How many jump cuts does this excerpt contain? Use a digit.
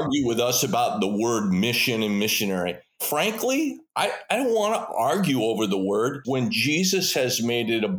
2